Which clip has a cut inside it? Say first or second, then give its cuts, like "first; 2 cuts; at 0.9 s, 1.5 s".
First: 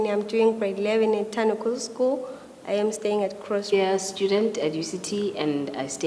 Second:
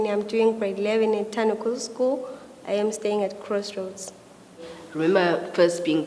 second; 1 cut; at 3.7 s